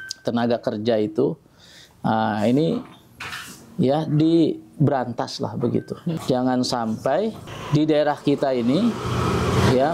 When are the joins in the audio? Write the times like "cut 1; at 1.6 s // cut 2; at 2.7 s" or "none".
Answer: cut 1; at 6.2 s // cut 2; at 7.5 s